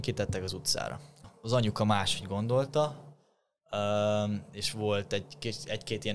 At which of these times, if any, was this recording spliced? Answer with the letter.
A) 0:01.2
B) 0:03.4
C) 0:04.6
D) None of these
A